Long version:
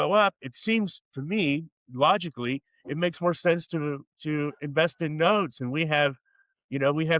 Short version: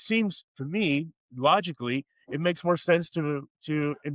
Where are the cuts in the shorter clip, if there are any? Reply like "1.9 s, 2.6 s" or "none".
none